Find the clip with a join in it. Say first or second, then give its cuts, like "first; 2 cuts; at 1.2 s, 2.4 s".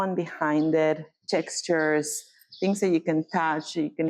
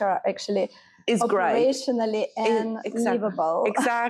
first; 1 cut; at 1.2 s